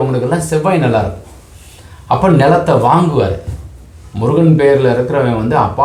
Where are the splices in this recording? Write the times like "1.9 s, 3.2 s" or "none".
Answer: none